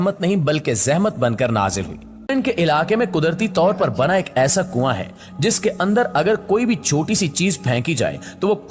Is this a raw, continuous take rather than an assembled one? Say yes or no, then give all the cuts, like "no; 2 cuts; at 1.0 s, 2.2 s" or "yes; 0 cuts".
no; 1 cut; at 2.3 s